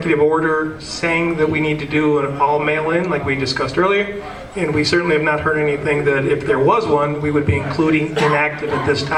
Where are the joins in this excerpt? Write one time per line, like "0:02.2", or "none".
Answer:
none